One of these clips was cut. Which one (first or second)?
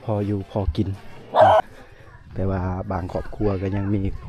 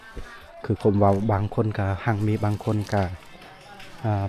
first